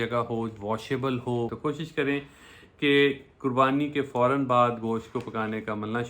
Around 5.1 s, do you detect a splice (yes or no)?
no